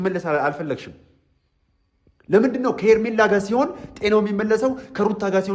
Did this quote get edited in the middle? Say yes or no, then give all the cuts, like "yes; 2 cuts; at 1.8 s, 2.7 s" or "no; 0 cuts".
no; 0 cuts